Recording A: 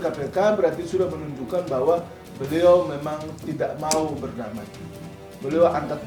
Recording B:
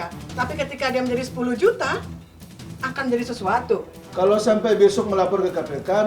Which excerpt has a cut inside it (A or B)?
B